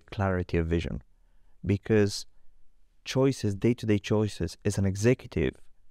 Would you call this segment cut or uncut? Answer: uncut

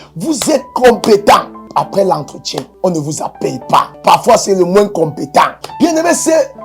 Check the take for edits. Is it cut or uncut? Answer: cut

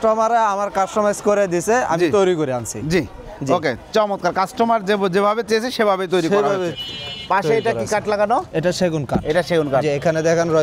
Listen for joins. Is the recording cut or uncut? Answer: uncut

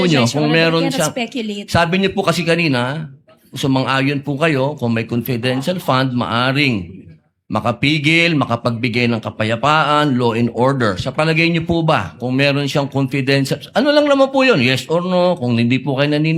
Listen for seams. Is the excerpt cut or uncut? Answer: uncut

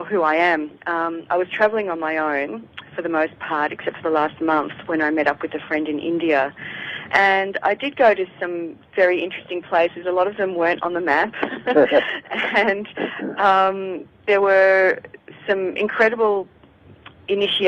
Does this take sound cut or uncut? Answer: cut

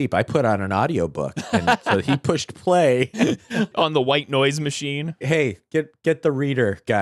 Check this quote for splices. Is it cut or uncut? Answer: cut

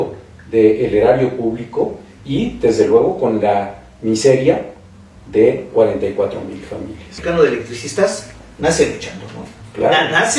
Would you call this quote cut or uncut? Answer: cut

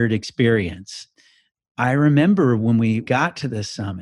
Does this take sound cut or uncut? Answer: cut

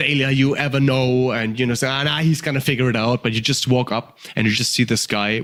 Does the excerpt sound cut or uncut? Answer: uncut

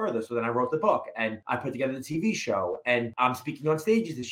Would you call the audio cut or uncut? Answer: cut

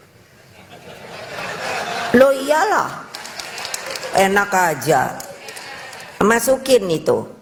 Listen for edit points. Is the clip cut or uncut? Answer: uncut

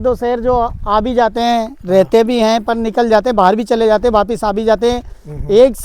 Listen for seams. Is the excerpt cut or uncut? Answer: uncut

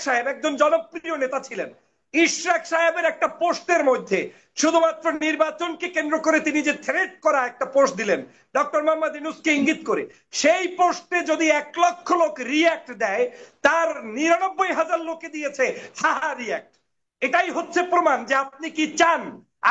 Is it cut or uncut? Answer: uncut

